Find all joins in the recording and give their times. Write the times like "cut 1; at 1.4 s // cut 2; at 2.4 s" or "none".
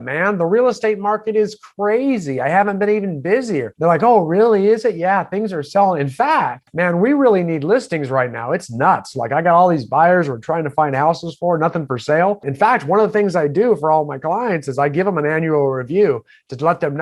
cut 1; at 3.7 s // cut 2; at 6.6 s // cut 3; at 12.5 s